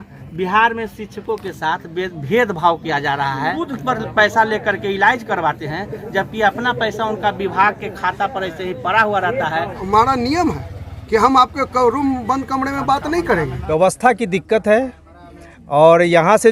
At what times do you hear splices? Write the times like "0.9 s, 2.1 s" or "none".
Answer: 3.6 s, 9.8 s, 13.6 s

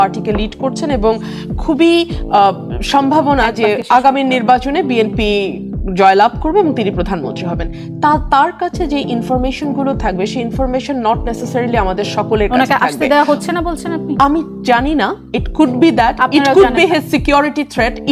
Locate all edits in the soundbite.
none

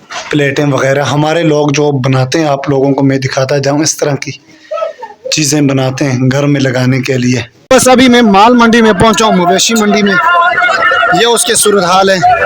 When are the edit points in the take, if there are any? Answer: 7.5 s

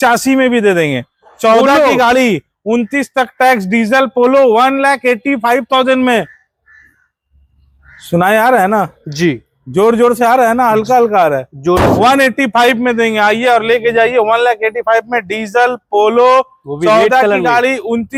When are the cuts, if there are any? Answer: none

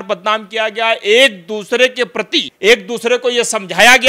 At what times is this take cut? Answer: 2.4 s

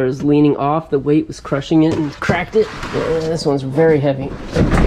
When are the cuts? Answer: none

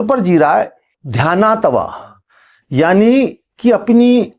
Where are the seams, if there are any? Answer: 1.0 s

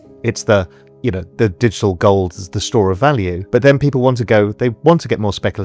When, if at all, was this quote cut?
3.4 s

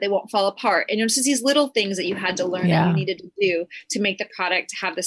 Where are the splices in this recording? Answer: none

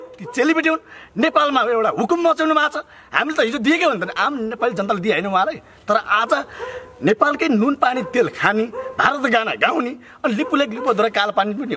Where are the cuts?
none

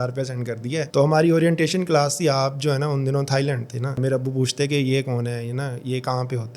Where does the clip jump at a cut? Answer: 4.0 s

